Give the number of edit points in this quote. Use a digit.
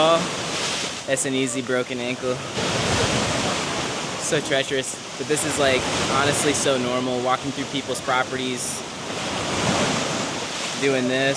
0